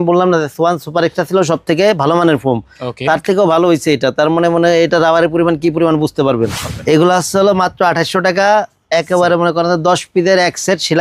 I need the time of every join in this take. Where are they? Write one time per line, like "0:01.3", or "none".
0:06.7